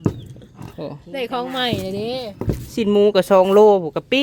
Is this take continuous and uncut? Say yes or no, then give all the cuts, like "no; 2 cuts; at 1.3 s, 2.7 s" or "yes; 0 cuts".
yes; 0 cuts